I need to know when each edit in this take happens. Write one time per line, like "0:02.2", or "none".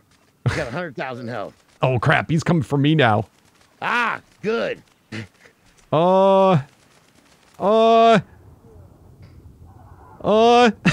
0:01.8